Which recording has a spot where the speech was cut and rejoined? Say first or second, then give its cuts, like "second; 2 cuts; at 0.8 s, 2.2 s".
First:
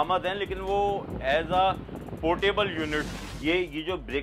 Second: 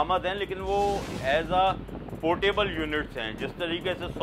first; 1 cut; at 3.1 s